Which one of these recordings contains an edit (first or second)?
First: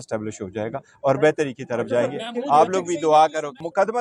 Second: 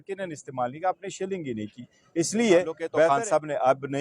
second